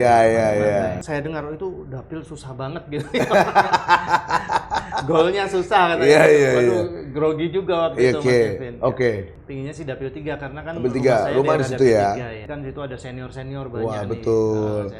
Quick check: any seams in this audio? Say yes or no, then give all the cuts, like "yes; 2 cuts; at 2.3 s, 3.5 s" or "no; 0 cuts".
yes; 3 cuts; at 1.0 s, 9.4 s, 12.4 s